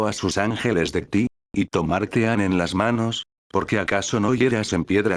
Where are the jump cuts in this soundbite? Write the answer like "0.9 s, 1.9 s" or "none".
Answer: none